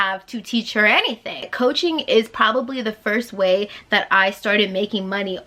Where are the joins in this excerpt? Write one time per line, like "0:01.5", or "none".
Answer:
0:01.5

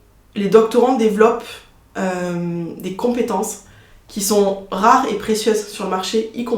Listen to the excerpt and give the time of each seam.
none

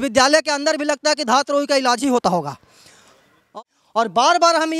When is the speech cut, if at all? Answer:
0:03.4

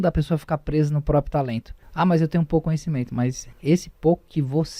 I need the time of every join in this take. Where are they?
0:01.8
0:03.5

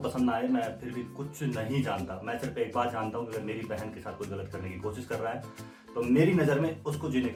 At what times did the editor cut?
none

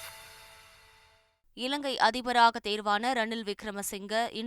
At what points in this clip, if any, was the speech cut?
none

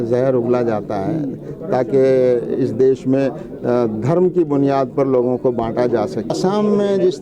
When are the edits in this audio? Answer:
0:06.3

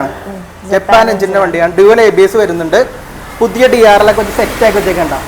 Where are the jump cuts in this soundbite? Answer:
none

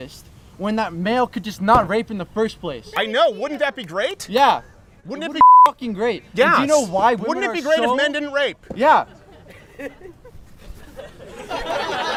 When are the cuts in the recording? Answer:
none

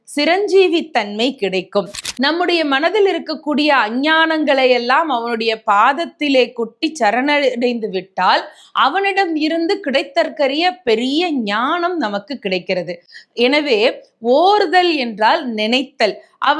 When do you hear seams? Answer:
0:02.0

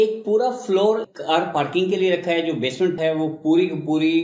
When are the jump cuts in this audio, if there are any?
0:01.0

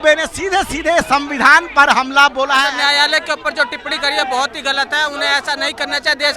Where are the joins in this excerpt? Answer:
0:02.7

